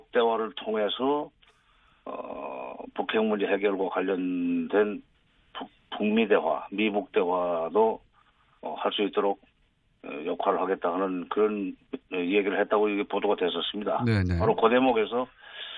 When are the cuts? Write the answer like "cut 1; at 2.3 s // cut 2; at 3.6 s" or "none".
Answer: none